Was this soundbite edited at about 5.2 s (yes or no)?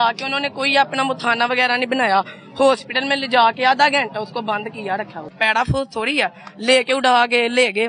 yes